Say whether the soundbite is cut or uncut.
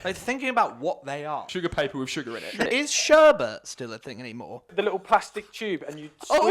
cut